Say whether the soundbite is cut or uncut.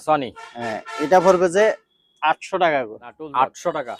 uncut